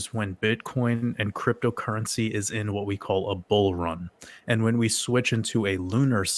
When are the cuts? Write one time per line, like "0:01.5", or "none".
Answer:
none